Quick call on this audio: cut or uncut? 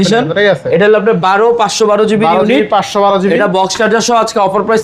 uncut